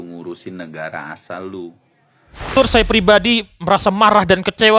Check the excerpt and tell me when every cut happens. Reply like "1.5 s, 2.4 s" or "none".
2.6 s